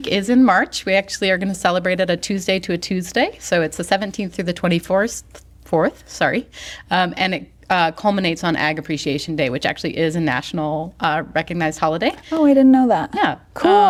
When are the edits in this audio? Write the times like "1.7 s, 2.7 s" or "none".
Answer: none